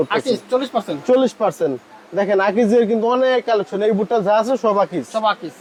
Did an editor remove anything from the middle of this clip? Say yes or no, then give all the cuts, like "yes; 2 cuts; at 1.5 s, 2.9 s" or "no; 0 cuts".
no; 0 cuts